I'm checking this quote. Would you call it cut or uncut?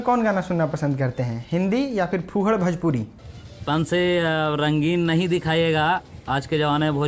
cut